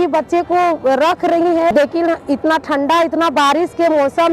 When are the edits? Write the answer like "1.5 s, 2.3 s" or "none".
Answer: 1.7 s